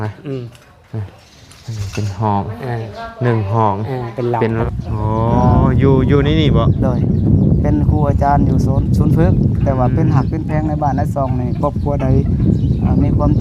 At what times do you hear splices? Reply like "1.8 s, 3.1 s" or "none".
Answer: 4.6 s

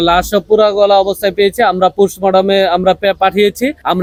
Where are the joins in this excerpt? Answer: none

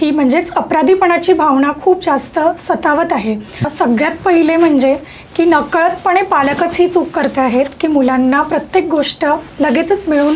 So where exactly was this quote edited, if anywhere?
3.7 s

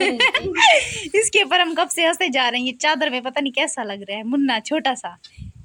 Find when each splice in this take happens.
none

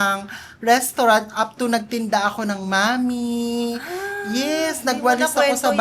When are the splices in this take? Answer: none

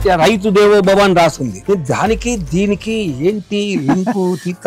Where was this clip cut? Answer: 1.6 s

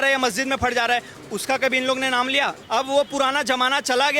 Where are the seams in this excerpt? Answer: 2.6 s

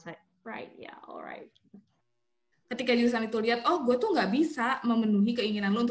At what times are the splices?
2.0 s

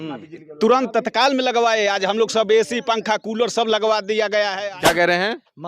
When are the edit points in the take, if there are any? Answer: 4.6 s

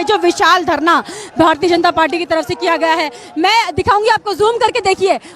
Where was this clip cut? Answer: none

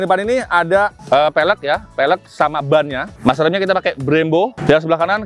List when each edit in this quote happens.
3.1 s

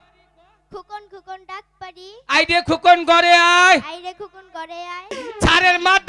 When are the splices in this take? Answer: 5.1 s

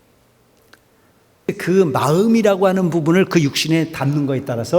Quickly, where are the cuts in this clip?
1.5 s

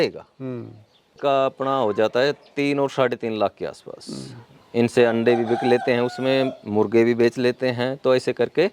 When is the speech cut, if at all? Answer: 1.2 s

